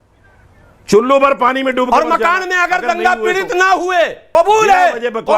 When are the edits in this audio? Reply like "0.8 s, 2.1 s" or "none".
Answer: 4.3 s